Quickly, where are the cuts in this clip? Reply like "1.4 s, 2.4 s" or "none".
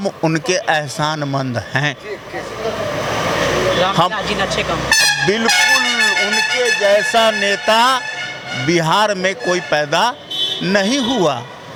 none